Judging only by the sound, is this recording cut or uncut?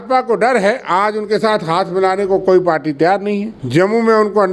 cut